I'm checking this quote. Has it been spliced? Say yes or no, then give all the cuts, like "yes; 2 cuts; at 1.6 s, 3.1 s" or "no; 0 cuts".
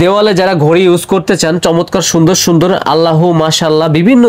no; 0 cuts